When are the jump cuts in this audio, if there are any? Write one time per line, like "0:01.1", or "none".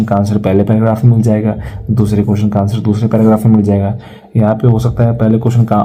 none